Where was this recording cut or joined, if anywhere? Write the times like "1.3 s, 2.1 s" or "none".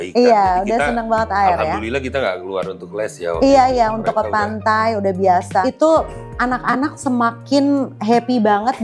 5.6 s